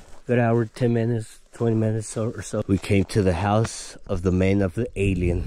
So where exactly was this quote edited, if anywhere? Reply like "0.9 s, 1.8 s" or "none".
2.6 s

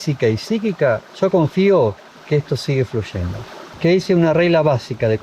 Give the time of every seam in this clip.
3.7 s

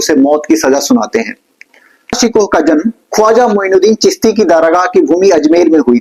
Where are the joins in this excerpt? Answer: 2.2 s

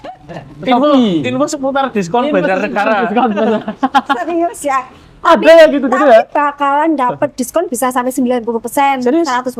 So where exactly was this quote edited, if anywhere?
none

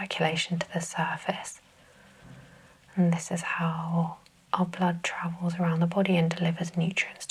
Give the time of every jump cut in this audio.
none

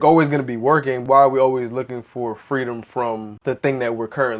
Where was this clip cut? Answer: 1.0 s, 3.3 s

